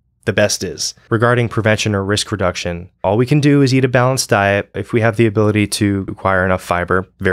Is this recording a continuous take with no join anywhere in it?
no; 4 cuts; at 1.0 s, 3.0 s, 4.8 s, 6.1 s

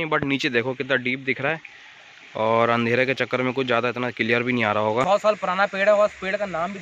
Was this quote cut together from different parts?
yes; 1 cut; at 5.1 s

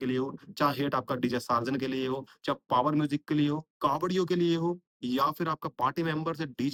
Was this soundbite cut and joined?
no; 0 cuts

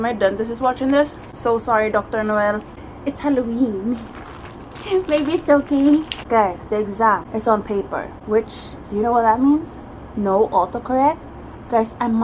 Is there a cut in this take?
yes; 2 cuts; at 6.1 s, 7.6 s

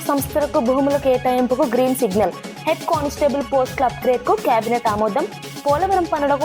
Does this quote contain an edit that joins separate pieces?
no; 0 cuts

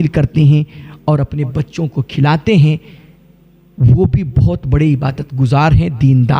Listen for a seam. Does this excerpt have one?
no; 0 cuts

